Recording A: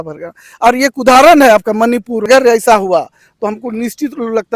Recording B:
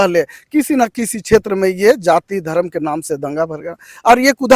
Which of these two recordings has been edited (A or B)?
A